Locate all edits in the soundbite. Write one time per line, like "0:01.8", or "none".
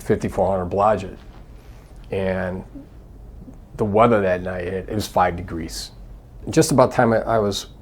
0:06.4

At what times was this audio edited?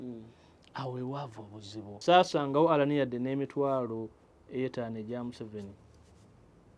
0:02.0

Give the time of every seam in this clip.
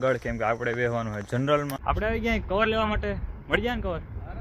0:01.8

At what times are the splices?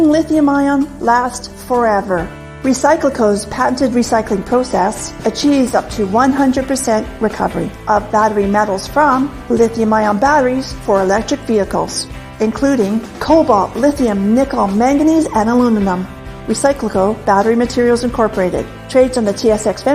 0:01.4

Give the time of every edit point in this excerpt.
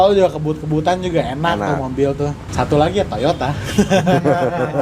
0:02.5

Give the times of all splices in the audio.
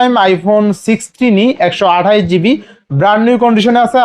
none

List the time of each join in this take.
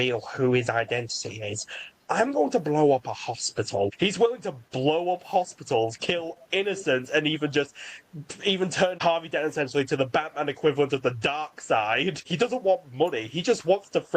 0:03.9
0:09.0
0:12.3

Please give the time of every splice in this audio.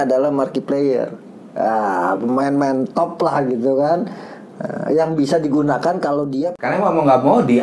0:06.5

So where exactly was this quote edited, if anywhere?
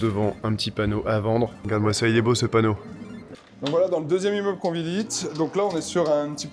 0:01.6
0:03.2

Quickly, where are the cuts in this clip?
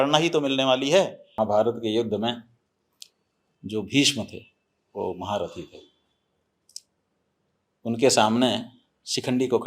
0:01.2

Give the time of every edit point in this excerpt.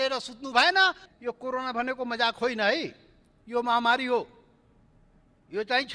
0:01.1

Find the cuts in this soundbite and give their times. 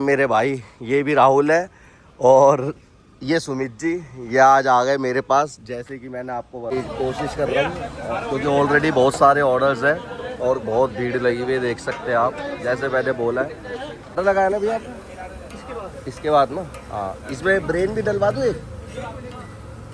0:06.7
0:14.2

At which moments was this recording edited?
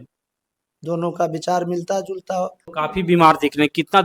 0:02.6

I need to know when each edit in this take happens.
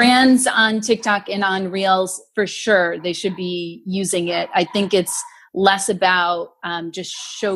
none

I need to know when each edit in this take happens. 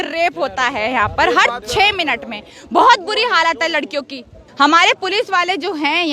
0:04.4

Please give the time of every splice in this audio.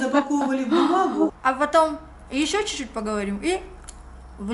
0:01.3

